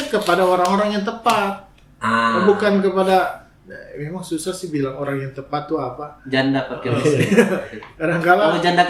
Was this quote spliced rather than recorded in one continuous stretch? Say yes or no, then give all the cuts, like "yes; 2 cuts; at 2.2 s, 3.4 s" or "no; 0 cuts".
no; 0 cuts